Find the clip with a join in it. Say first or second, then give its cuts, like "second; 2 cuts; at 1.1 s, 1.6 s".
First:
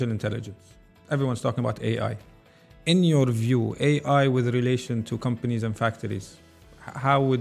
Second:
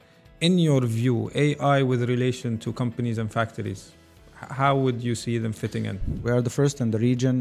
second; 1 cut; at 6.1 s